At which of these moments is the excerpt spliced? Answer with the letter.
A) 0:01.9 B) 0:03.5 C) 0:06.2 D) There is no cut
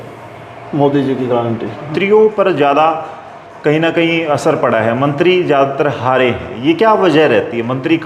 A